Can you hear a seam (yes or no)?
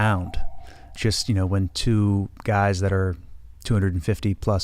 yes